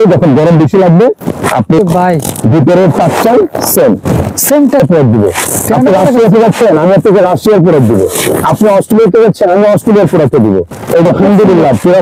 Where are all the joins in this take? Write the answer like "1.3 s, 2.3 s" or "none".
1.8 s, 4.8 s, 11.1 s